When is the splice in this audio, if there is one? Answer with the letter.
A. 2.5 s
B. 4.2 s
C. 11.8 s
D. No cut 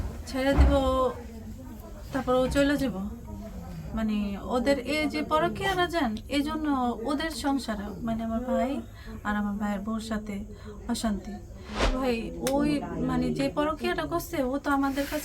C